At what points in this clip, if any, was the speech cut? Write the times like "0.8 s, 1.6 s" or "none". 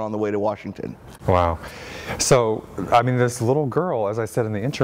none